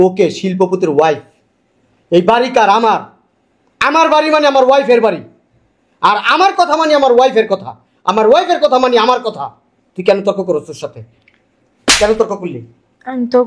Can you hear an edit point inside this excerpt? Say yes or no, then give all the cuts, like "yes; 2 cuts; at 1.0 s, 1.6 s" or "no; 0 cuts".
no; 0 cuts